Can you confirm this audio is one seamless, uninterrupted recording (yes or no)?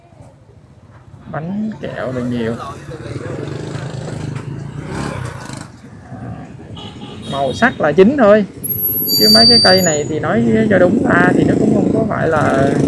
no